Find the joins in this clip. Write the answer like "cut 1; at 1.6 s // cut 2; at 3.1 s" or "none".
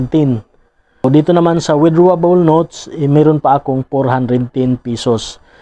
cut 1; at 1.0 s